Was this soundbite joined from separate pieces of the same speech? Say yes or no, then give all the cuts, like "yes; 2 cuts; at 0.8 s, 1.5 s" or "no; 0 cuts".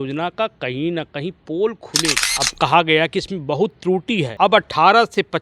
yes; 2 cuts; at 2.2 s, 4.3 s